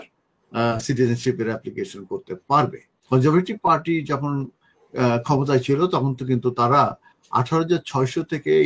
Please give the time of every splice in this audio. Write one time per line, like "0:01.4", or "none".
0:02.9